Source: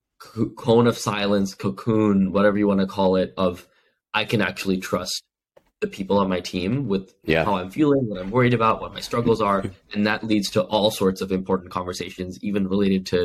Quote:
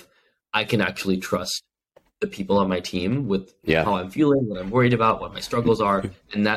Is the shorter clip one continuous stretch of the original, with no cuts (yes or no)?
yes